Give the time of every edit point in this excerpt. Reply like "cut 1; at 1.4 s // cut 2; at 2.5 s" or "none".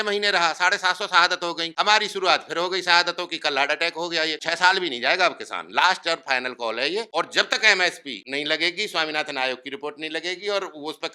cut 1; at 1.6 s // cut 2; at 4.4 s // cut 3; at 7.1 s // cut 4; at 8.1 s